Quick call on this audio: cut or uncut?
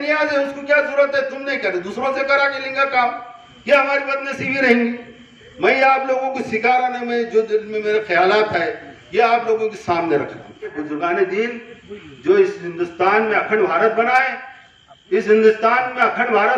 cut